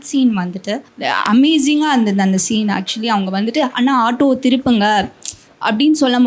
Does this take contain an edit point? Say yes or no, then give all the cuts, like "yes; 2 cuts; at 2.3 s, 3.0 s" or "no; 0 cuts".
yes; 1 cut; at 0.9 s